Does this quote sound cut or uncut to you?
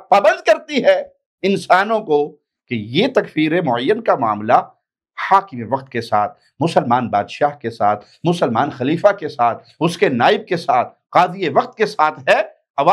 uncut